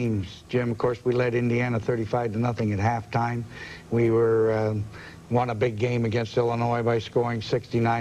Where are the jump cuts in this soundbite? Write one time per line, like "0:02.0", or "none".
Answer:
none